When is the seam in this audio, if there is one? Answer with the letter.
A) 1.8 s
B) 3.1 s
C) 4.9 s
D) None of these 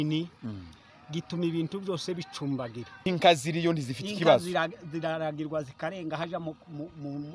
B